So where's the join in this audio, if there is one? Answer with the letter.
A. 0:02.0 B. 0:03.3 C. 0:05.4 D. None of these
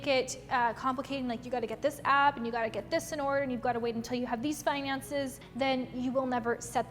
C